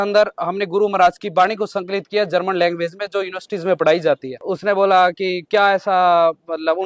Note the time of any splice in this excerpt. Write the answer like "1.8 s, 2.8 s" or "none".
4.3 s

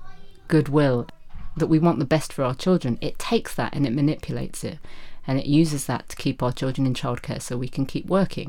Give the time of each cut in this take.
1.1 s

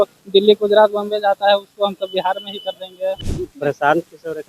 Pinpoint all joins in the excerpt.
3.3 s

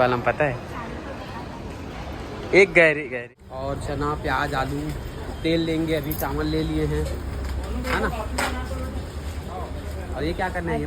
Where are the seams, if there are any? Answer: 3.1 s

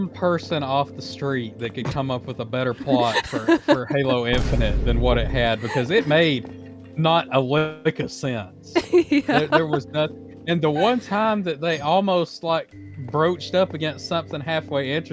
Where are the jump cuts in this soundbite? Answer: none

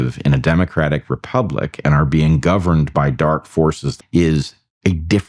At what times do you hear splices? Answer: 3.9 s

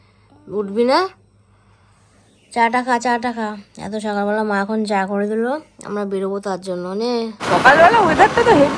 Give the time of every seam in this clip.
7.3 s

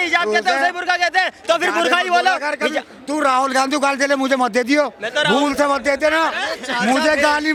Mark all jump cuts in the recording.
none

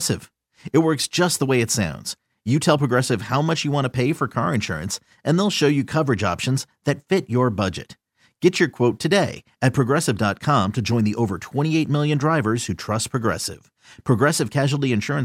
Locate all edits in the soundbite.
none

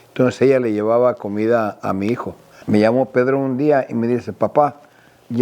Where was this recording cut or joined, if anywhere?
2.6 s

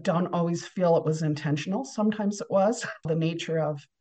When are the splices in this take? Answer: 3.1 s

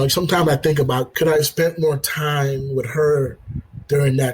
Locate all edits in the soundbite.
1.1 s

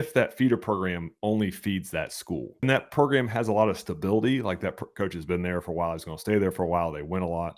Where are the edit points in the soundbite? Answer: 2.6 s

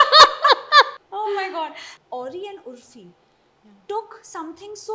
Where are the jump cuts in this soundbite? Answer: 0.9 s, 1.9 s

